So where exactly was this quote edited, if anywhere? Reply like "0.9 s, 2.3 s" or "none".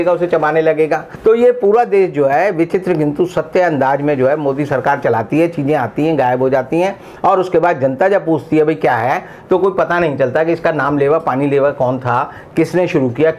1.1 s